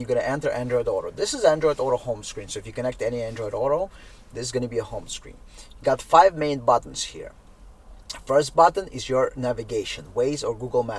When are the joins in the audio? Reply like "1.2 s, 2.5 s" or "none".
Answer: none